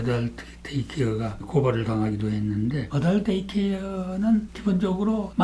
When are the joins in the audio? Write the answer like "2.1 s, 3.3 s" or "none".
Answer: none